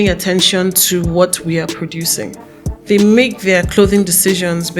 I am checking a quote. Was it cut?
yes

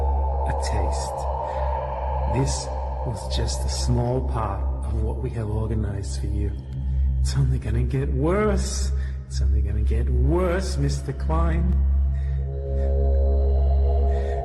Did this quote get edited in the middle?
no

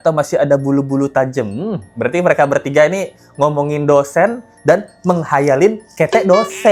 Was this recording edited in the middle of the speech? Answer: no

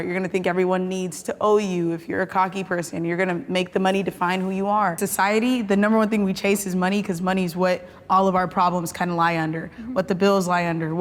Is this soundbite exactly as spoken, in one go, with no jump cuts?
no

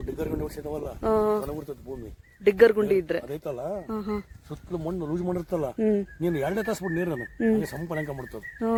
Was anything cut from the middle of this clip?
no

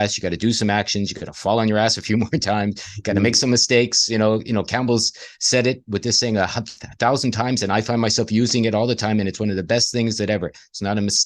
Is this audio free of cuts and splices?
yes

